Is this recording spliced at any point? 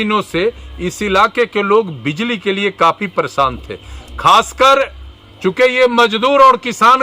no; 0 cuts

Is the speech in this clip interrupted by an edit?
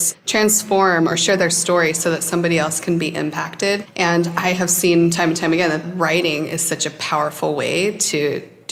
no; 0 cuts

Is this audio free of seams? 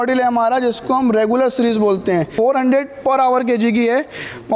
no; 1 cut; at 2.3 s

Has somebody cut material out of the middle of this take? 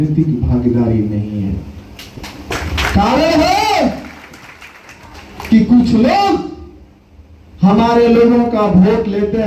no; 0 cuts

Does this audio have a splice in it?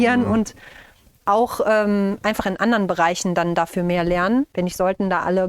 yes; 1 cut; at 4.5 s

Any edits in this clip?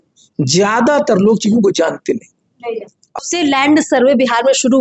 yes; 1 cut; at 3.2 s

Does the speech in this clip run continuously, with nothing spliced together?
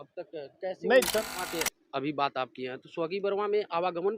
no; 1 cut; at 1.3 s

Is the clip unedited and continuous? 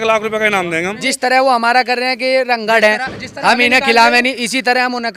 no; 1 cut; at 1.0 s

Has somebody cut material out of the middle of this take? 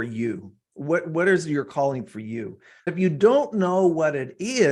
yes; 1 cut; at 2.9 s

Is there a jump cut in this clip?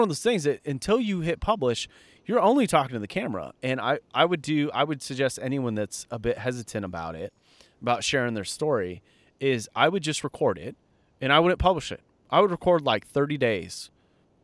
no; 0 cuts

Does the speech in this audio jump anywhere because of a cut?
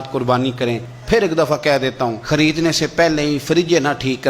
yes; 2 cuts; at 0.9 s, 2.2 s

